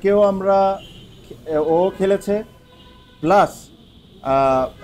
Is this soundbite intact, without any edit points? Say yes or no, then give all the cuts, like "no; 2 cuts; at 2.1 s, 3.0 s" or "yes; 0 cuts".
yes; 0 cuts